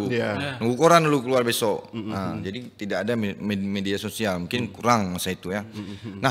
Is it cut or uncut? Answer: uncut